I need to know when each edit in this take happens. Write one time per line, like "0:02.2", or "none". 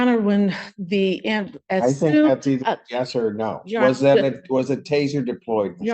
none